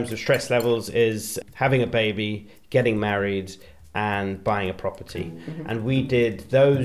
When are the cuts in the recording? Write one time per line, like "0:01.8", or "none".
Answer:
none